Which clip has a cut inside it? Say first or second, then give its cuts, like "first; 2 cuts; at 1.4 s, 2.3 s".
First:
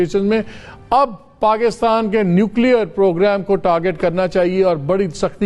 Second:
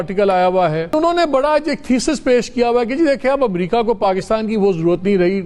second; 1 cut; at 1.0 s